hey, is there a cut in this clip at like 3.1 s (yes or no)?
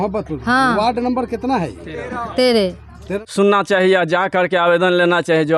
yes